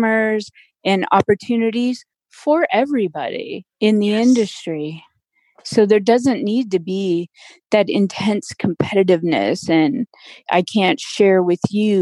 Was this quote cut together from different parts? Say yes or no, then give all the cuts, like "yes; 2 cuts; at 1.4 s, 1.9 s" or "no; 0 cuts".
yes; 2 cuts; at 3.7 s, 10.4 s